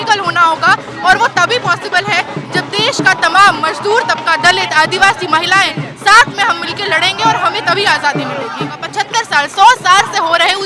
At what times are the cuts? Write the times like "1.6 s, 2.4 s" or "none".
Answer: 8.8 s

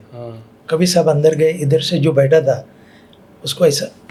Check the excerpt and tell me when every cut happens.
none

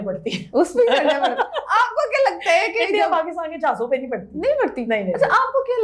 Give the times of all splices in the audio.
none

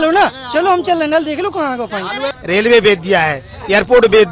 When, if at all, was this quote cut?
2.3 s

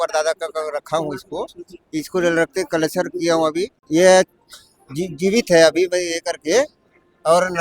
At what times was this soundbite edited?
3.8 s

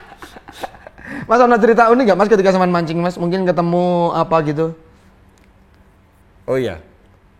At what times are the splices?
none

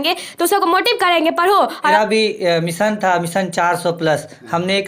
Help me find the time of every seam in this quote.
1.9 s

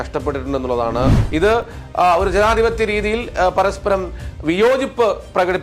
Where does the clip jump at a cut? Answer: 1.1 s

